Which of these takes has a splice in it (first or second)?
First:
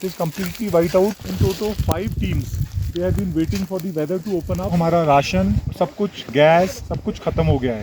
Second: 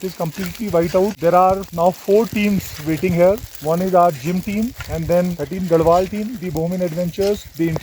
first